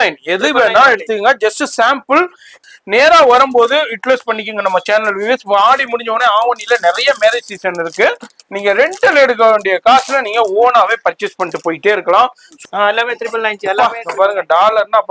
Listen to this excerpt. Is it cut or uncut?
cut